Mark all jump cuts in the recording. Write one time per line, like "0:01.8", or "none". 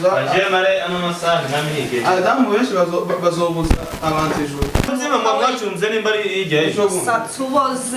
0:04.9